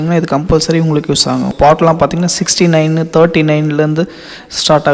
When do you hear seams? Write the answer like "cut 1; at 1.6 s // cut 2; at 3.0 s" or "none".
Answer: cut 1; at 1.5 s